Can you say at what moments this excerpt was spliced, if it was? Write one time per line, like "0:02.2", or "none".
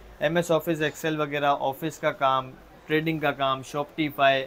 none